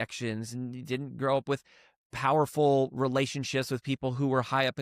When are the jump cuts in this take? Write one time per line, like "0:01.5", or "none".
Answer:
none